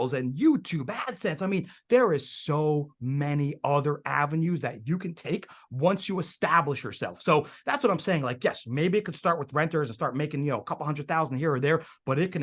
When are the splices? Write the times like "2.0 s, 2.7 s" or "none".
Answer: none